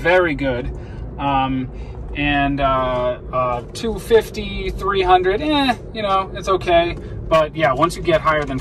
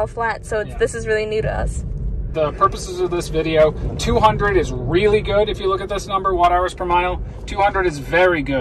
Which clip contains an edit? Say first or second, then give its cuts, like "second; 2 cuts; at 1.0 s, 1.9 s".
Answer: second; 1 cut; at 2.3 s